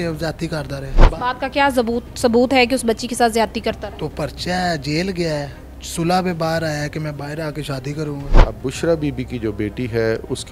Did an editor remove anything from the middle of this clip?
yes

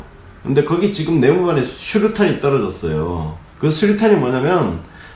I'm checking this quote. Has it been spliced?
yes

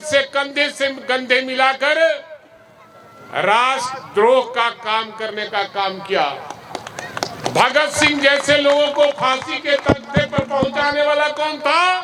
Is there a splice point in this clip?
no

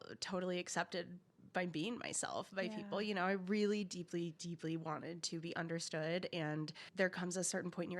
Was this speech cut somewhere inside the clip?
yes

